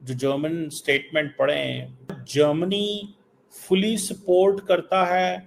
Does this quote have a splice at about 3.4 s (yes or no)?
no